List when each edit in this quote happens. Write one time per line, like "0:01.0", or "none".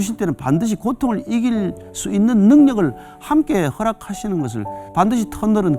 0:04.8